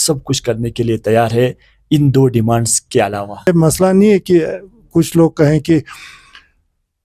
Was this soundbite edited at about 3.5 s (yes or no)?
yes